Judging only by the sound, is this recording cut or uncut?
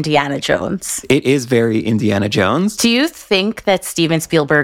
uncut